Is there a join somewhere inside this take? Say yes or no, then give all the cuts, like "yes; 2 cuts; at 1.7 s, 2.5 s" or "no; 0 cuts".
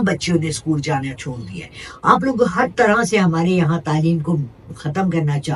no; 0 cuts